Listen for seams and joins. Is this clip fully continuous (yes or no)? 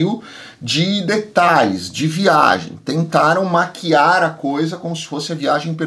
yes